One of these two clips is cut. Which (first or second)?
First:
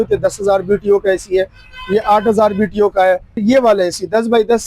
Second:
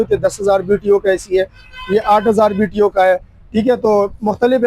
first